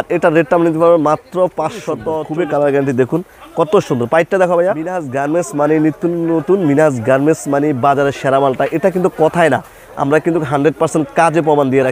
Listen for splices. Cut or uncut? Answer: cut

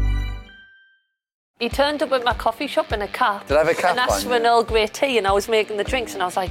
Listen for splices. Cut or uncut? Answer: cut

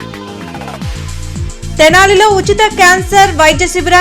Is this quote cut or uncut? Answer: cut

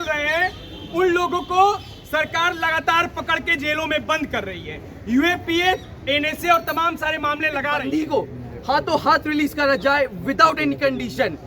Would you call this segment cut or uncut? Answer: cut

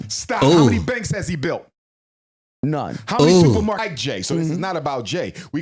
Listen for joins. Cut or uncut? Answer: cut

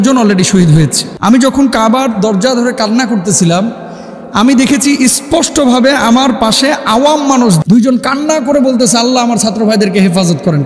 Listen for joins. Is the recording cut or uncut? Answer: cut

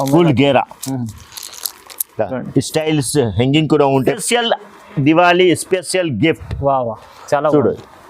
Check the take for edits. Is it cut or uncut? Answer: cut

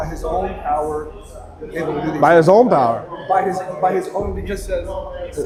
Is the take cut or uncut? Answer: uncut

